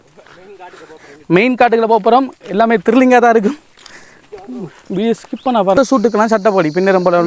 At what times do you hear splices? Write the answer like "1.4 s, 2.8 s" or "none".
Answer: 5.8 s

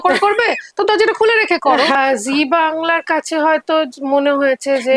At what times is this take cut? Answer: 2.0 s

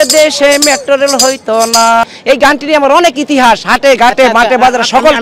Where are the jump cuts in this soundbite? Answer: 2.0 s

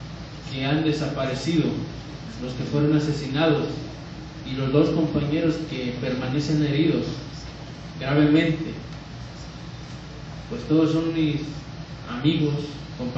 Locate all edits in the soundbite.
11.2 s

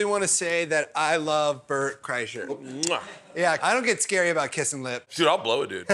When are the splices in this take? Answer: 2.6 s, 3.6 s, 5.1 s

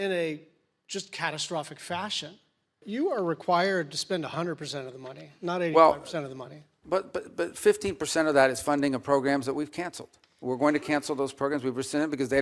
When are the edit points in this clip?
2.8 s

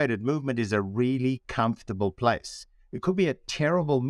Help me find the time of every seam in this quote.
none

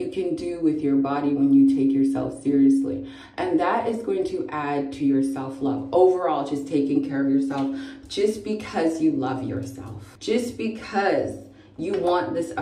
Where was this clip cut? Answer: none

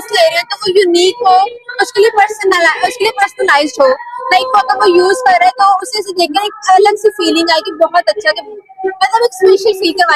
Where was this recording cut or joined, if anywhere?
none

